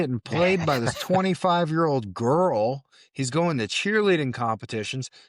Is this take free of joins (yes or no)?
yes